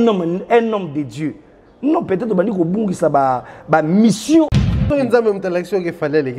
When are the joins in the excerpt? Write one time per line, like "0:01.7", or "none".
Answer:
0:04.5